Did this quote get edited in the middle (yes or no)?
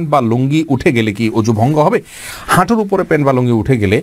no